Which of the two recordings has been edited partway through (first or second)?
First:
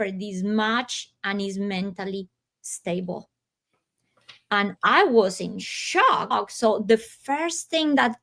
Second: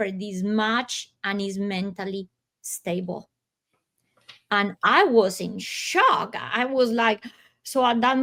first